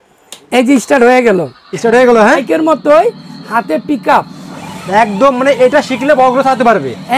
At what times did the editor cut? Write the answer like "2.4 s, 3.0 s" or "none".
2.4 s